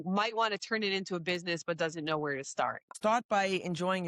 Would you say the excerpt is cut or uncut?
cut